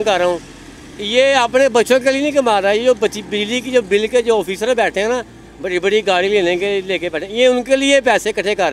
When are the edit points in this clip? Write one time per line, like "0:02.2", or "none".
none